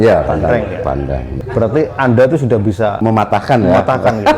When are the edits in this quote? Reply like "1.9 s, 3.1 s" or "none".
1.3 s, 3.0 s